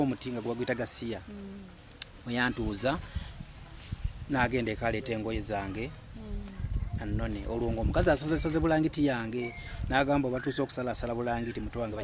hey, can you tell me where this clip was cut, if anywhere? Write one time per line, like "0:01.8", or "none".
none